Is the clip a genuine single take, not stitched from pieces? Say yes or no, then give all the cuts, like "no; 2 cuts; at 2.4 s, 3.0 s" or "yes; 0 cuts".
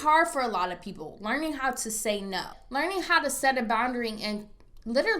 no; 1 cut; at 2.6 s